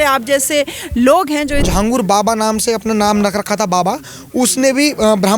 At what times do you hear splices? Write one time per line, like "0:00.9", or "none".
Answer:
0:01.7